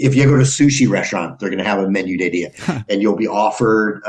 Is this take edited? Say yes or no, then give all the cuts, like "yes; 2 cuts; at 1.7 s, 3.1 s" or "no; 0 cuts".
yes; 1 cut; at 2.7 s